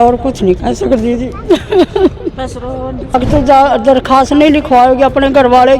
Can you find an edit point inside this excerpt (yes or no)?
yes